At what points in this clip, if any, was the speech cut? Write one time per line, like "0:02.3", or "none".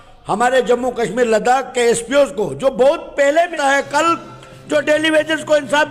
0:03.5

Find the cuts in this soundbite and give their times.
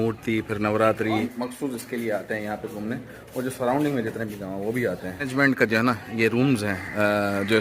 0:01.3
0:05.3

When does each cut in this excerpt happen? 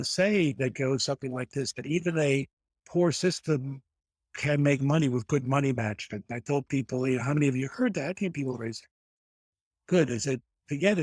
none

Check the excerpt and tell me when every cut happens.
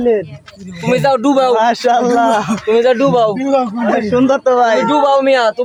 none

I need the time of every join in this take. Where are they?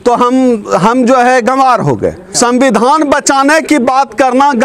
0:02.2

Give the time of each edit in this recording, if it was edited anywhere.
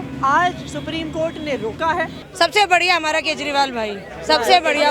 0:02.2

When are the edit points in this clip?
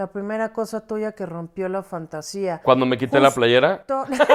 none

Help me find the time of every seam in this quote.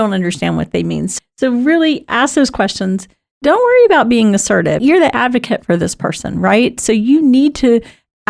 0:01.1

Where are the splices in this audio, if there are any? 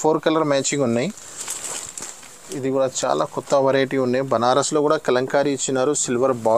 0:02.5

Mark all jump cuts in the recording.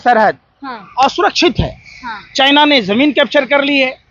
none

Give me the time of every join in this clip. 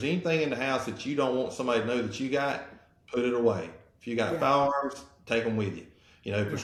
none

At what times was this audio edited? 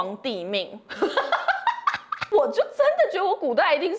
0:02.2

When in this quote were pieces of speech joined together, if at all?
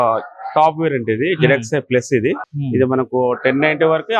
0:02.4

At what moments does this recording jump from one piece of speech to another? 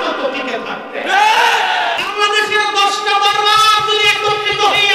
0:02.0

